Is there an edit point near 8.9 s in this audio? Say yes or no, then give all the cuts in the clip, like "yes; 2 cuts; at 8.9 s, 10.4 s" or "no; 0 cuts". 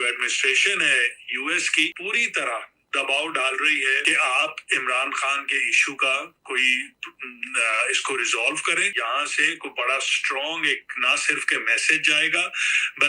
yes; 3 cuts; at 2.0 s, 4.0 s, 8.9 s